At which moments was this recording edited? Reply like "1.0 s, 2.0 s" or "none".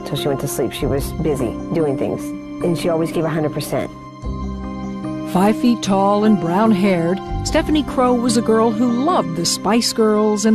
9.2 s